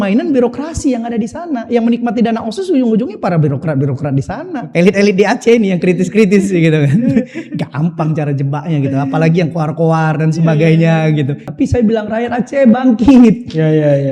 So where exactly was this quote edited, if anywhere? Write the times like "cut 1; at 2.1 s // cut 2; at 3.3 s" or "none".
cut 1; at 4.5 s // cut 2; at 11.4 s